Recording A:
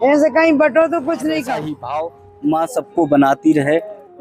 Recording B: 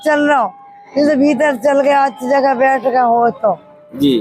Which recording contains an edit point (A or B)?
A